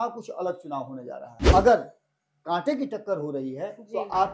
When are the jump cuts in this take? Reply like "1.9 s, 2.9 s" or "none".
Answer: 1.3 s